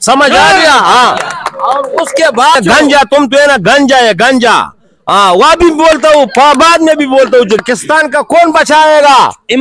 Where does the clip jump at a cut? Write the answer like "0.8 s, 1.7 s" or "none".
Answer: 2.6 s, 7.6 s